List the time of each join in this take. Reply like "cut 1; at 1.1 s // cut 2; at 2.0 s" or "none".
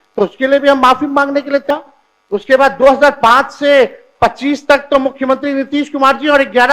cut 1; at 1.7 s